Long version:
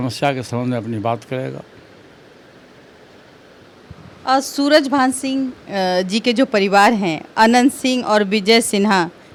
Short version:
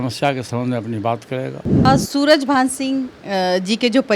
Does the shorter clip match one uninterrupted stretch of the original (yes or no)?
no